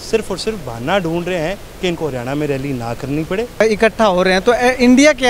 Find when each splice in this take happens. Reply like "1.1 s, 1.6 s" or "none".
3.6 s